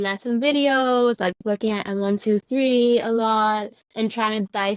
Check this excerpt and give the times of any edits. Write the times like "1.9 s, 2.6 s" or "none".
none